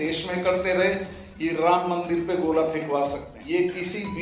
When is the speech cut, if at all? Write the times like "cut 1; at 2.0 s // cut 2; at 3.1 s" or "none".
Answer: cut 1; at 3.3 s